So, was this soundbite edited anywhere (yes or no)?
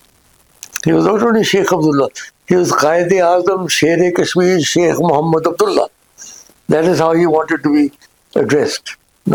no